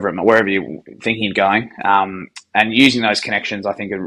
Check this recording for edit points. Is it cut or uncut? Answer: uncut